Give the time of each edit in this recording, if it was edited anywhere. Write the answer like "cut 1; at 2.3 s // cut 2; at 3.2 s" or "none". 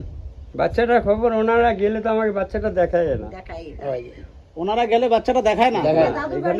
none